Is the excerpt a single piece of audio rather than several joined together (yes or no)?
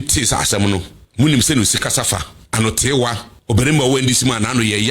no